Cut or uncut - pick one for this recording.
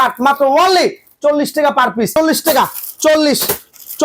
cut